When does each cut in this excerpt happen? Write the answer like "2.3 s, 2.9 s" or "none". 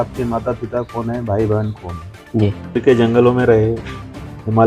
2.8 s